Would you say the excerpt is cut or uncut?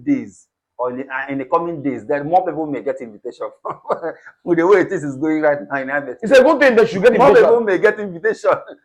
uncut